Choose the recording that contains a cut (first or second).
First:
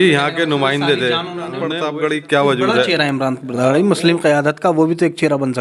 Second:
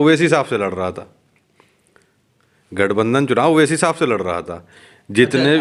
first